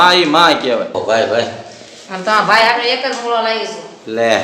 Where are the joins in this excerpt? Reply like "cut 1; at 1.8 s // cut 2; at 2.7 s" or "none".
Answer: cut 1; at 1.0 s